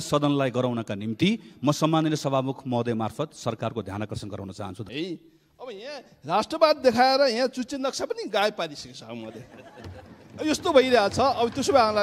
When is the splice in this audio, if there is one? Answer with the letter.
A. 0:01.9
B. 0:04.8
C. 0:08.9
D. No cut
B